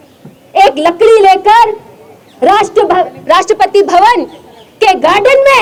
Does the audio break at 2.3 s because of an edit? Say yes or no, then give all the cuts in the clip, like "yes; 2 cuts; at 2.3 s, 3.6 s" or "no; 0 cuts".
no; 0 cuts